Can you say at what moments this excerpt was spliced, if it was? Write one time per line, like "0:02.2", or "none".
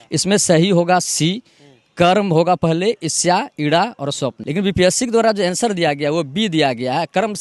0:04.4